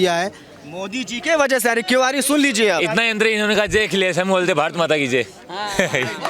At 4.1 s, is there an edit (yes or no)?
no